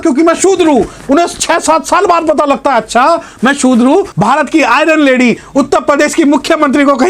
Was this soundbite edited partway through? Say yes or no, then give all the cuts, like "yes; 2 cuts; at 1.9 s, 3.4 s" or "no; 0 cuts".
yes; 1 cut; at 4.1 s